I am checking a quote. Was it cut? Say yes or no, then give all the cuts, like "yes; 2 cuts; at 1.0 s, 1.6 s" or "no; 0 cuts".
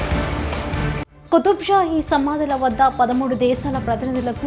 yes; 1 cut; at 1.1 s